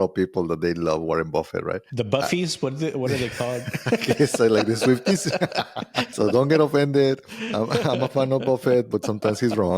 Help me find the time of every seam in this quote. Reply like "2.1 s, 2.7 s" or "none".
1.9 s, 6.1 s